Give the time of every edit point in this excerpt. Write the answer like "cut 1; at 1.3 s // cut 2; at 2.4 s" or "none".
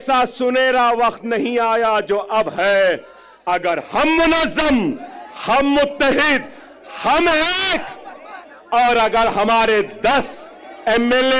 none

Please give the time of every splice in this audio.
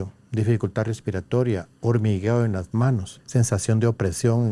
cut 1; at 3.1 s

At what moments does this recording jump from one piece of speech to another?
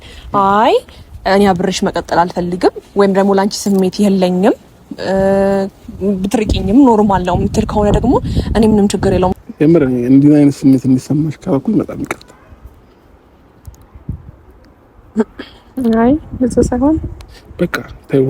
cut 1; at 9.4 s

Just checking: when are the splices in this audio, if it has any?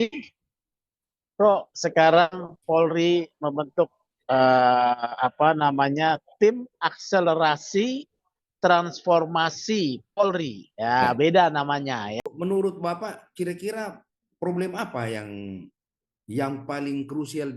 cut 1; at 12.2 s

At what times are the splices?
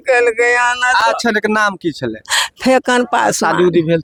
none

